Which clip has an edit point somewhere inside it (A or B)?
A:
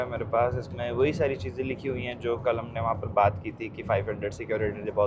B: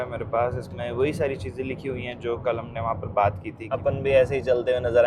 B